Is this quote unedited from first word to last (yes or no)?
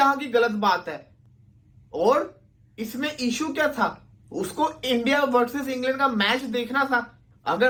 yes